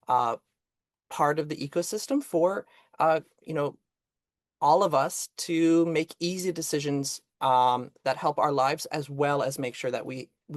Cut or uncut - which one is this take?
uncut